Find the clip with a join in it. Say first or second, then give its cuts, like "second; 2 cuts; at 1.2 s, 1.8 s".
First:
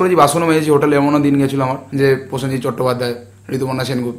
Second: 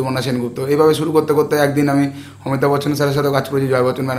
first; 1 cut; at 1.8 s